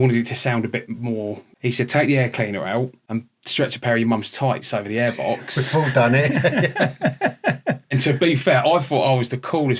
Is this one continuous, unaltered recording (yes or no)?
no